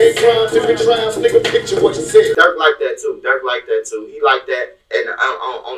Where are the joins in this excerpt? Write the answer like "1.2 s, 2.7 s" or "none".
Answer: 2.3 s